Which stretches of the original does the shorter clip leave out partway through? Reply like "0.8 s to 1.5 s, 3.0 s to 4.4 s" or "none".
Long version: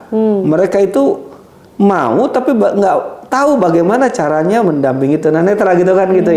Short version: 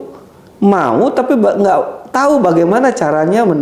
none